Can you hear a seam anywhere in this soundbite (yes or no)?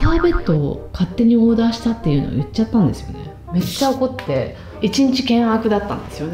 yes